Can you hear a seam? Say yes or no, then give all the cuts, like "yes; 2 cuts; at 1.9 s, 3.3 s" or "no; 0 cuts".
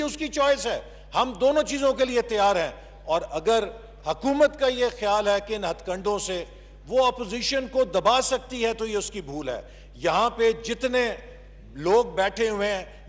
no; 0 cuts